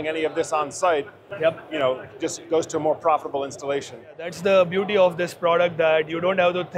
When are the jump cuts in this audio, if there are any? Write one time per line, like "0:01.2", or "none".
0:04.3